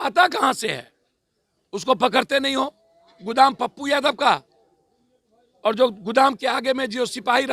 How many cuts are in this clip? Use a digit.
0